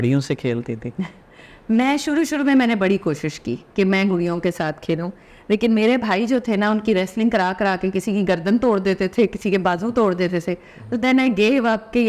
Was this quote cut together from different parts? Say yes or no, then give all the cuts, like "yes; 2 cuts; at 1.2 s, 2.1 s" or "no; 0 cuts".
no; 0 cuts